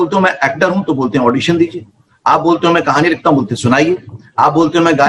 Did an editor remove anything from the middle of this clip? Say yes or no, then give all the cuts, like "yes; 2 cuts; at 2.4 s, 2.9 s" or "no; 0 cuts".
no; 0 cuts